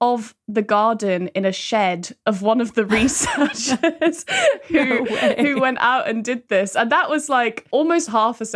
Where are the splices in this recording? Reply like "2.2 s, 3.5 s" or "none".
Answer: 7.6 s